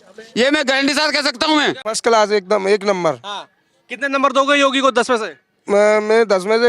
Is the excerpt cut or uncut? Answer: cut